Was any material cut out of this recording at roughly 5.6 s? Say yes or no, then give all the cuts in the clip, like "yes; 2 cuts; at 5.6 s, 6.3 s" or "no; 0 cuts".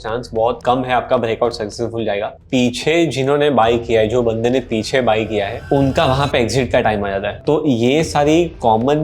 no; 2 cuts; at 2.3 s, 7.4 s